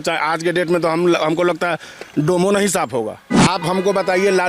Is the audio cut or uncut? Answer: cut